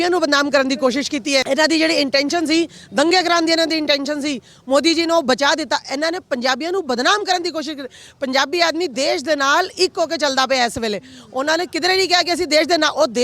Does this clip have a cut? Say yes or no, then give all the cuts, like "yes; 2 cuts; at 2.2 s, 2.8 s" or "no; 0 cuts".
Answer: yes; 1 cut; at 1.4 s